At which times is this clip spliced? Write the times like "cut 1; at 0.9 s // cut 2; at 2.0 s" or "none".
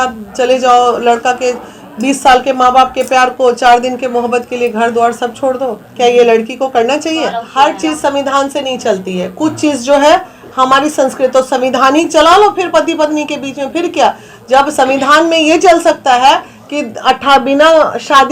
cut 1; at 7.4 s